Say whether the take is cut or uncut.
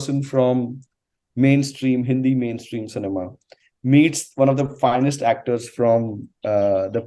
uncut